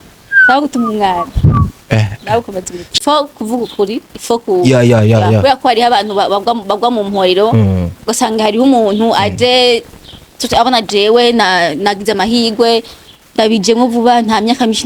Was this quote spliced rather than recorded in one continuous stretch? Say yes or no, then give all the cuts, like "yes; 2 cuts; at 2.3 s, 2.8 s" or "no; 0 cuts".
yes; 1 cut; at 2.8 s